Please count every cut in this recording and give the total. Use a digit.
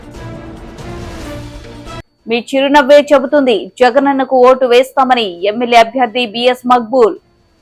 1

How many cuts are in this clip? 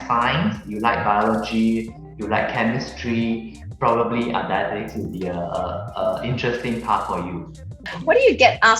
2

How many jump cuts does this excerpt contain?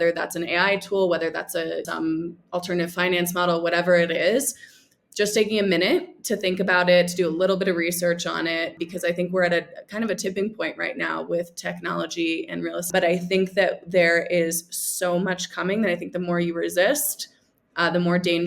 3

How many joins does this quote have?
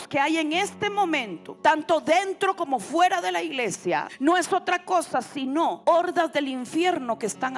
3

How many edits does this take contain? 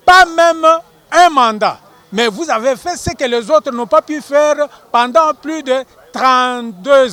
0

